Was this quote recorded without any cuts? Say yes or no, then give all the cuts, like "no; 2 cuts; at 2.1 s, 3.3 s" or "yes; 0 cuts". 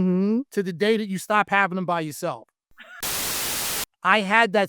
no; 1 cut; at 3.3 s